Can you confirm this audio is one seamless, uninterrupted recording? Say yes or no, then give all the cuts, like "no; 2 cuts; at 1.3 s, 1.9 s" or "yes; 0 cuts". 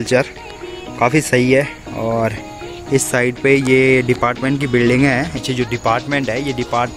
no; 1 cut; at 5.3 s